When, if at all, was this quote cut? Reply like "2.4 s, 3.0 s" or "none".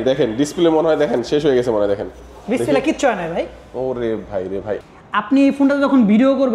4.8 s